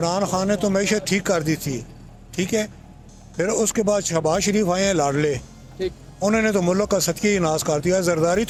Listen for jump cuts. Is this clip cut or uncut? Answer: uncut